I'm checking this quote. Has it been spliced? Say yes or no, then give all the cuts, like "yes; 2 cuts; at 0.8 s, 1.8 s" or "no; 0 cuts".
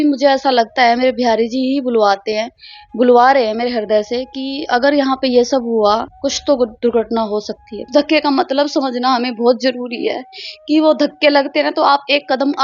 yes; 2 cuts; at 6.1 s, 7.8 s